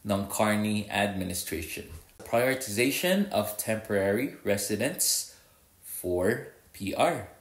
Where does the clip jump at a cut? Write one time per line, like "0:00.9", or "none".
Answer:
0:02.2